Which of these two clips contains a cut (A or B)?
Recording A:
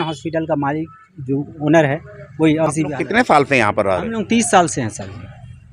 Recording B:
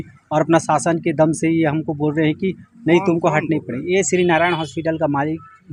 A